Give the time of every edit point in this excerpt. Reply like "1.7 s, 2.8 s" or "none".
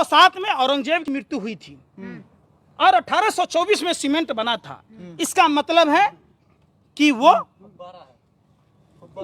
1.1 s